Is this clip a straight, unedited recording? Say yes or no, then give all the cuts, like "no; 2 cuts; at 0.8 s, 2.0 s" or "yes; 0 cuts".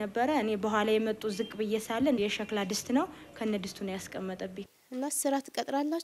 no; 1 cut; at 4.6 s